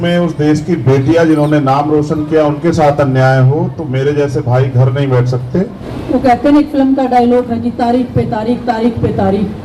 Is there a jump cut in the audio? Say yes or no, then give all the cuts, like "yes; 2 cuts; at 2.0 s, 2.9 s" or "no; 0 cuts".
yes; 1 cut; at 5.9 s